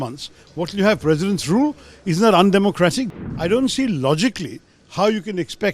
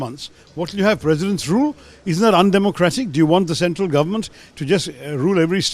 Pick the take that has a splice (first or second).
first